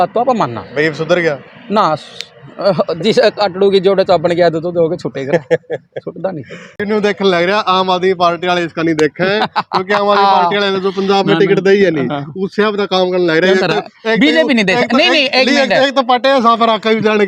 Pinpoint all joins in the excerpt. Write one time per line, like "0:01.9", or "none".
0:06.8